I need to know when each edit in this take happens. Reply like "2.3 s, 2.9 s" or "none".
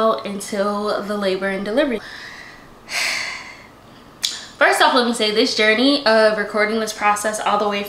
2.0 s